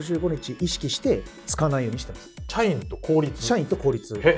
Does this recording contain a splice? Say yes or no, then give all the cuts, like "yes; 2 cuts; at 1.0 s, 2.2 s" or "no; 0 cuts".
yes; 1 cut; at 2.4 s